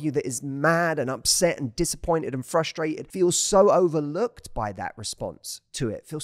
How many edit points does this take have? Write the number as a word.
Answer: one